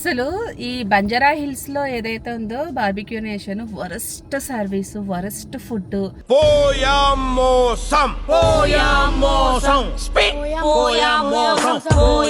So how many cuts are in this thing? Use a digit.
0